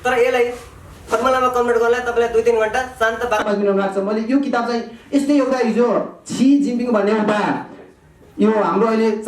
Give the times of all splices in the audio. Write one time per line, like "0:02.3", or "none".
0:03.4